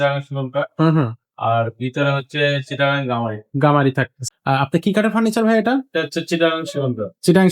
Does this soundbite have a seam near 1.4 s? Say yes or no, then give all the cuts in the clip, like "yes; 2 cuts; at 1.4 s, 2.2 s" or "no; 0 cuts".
no; 1 cut; at 4.2 s